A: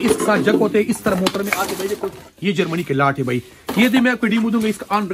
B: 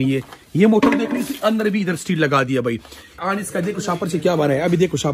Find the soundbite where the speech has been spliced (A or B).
B